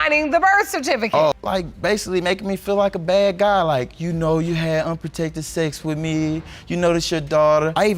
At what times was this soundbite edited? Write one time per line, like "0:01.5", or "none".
0:01.3